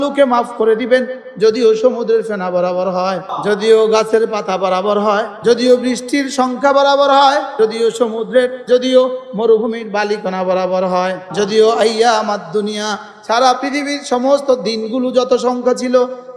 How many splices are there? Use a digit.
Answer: 5